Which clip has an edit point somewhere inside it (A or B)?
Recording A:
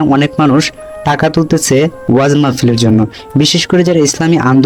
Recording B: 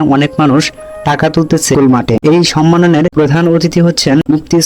B